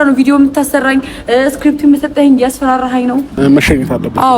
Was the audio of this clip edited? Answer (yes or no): yes